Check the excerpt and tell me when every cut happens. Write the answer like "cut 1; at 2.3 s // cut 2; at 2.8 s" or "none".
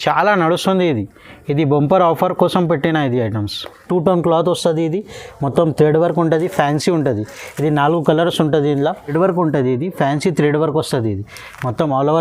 cut 1; at 3.8 s // cut 2; at 9.1 s